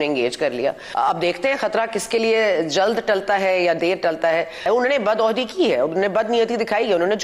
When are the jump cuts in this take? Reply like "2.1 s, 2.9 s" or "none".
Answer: 0.8 s, 4.6 s